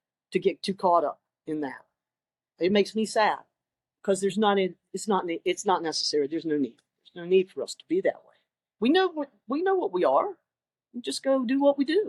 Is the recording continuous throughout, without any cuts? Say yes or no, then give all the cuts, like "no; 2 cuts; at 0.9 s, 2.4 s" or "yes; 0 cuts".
yes; 0 cuts